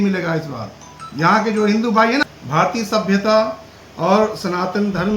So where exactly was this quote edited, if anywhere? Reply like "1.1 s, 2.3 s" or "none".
2.2 s